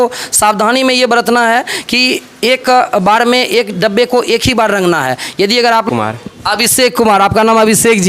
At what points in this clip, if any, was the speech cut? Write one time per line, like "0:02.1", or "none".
0:05.9